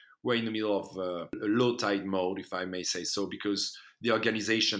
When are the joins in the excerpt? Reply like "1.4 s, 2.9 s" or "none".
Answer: 1.4 s